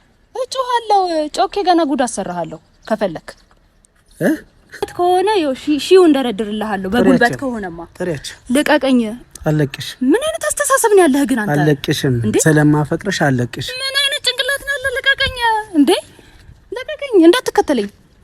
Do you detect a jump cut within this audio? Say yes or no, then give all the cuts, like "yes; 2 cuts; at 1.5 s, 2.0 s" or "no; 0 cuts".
yes; 1 cut; at 4.9 s